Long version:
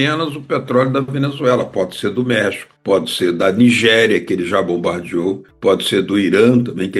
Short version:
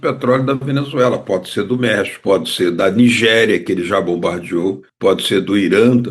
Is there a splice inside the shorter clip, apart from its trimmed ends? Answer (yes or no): yes